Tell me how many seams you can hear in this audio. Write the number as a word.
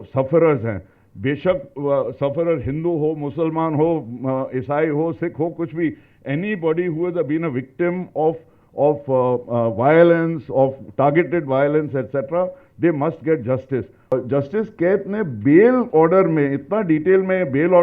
one